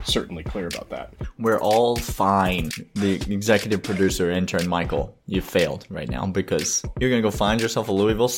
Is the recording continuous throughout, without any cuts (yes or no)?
no